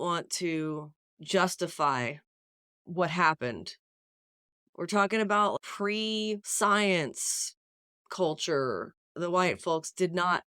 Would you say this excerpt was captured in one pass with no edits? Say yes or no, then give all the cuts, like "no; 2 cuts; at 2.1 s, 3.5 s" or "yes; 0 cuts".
no; 2 cuts; at 6.5 s, 9.2 s